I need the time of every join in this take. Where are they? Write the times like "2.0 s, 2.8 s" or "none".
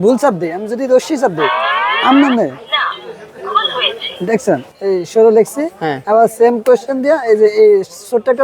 4.7 s